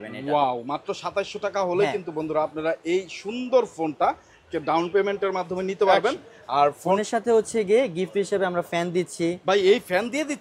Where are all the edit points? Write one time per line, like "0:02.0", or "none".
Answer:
0:07.0